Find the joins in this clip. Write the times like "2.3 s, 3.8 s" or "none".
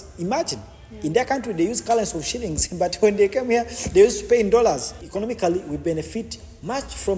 5.0 s